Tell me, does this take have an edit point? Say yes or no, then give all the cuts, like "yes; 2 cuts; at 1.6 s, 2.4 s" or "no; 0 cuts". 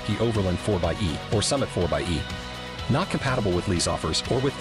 no; 0 cuts